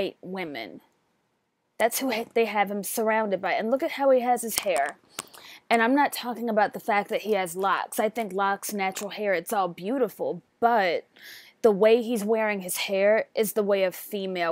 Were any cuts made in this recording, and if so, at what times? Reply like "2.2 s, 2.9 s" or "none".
7.4 s